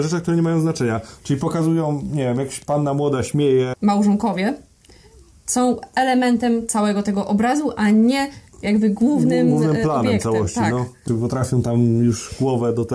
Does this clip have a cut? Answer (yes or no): yes